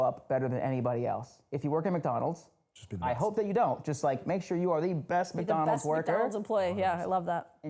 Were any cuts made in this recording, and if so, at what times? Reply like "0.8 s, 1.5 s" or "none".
1.4 s